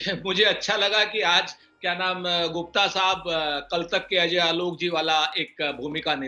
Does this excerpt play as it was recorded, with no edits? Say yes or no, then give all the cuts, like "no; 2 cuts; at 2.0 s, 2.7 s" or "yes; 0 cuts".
yes; 0 cuts